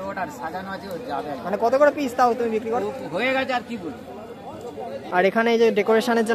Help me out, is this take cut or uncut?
cut